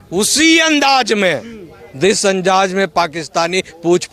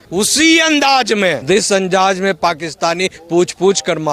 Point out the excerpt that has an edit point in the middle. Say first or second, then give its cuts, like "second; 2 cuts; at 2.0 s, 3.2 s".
second; 1 cut; at 1.4 s